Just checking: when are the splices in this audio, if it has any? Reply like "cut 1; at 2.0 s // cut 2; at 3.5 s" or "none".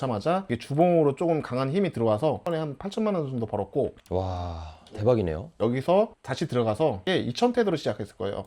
cut 1; at 2.5 s // cut 2; at 5.6 s // cut 3; at 7.0 s